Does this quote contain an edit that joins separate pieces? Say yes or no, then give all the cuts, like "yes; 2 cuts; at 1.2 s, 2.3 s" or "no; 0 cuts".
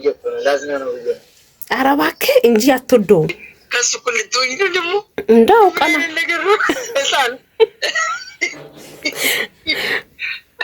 yes; 1 cut; at 3.5 s